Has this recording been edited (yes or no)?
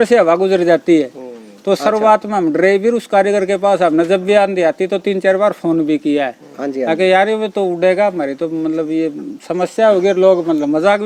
no